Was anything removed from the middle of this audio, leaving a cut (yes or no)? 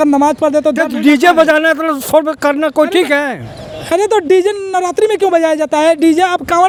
no